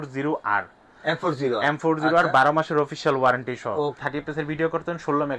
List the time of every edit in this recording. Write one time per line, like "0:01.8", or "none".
0:04.0